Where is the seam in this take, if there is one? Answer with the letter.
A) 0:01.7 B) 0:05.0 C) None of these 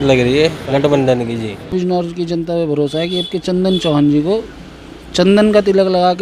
A